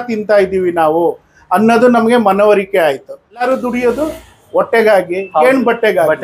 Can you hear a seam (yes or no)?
yes